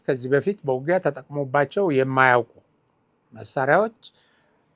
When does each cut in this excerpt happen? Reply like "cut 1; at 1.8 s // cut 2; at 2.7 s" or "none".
none